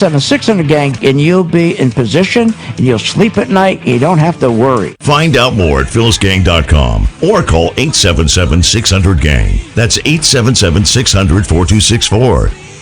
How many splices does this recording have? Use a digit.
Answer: 1